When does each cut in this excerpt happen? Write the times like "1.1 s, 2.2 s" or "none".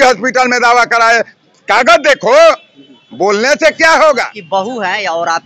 4.4 s